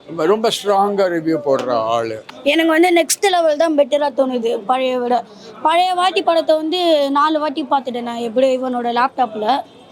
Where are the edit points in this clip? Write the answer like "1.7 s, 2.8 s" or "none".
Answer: 2.2 s